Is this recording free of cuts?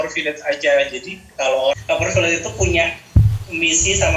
no; 1 cut; at 1.7 s

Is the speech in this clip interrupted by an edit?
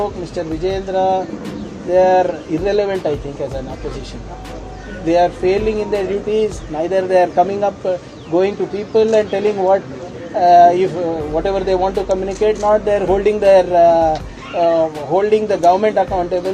no; 0 cuts

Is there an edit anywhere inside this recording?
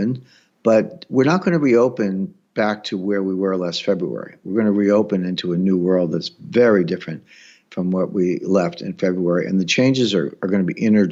no; 0 cuts

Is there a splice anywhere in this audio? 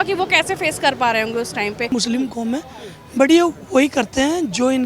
yes; 1 cut; at 1.9 s

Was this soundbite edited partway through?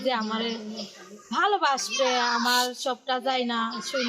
no; 0 cuts

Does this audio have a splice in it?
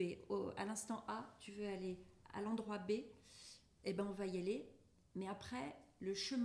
no; 0 cuts

